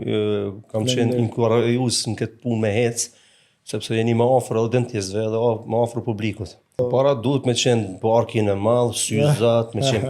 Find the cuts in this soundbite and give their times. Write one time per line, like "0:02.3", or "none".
0:06.8